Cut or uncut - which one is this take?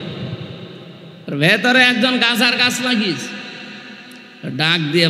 uncut